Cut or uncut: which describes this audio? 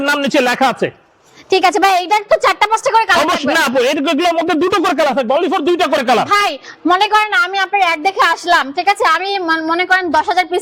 uncut